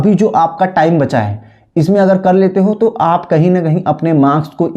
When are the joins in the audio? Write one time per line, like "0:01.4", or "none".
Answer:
none